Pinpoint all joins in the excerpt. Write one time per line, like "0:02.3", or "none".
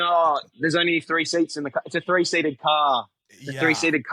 none